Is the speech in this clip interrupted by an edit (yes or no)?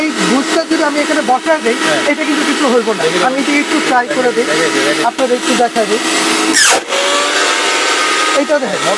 no